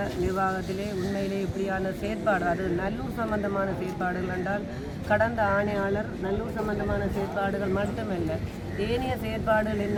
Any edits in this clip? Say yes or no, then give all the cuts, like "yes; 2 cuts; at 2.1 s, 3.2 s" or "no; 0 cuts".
no; 0 cuts